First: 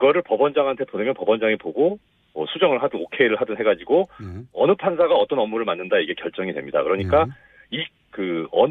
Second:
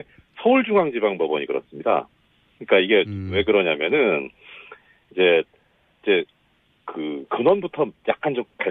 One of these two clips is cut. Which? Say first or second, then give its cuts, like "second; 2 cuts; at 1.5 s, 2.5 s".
second; 1 cut; at 3.2 s